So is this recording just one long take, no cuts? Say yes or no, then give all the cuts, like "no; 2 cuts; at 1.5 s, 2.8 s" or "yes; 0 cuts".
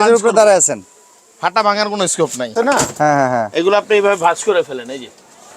no; 1 cut; at 2.5 s